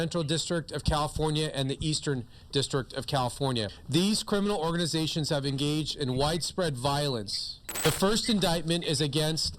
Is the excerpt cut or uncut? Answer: cut